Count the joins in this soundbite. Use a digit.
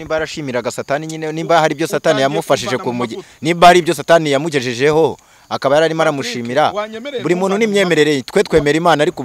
0